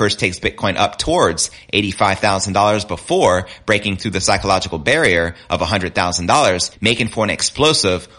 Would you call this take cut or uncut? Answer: cut